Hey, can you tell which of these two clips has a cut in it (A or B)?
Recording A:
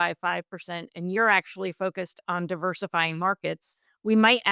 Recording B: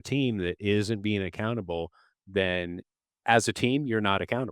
B